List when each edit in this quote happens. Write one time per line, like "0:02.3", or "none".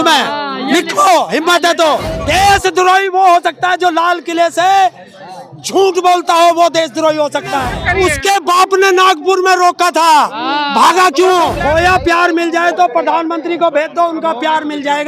0:02.1
0:07.7
0:11.6